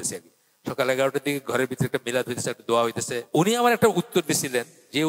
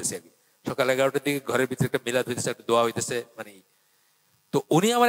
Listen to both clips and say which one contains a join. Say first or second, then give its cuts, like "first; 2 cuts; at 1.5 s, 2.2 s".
first; 1 cut; at 3.3 s